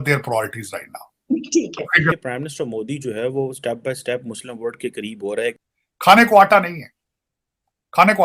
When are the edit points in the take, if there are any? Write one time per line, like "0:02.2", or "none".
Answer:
0:02.1
0:05.6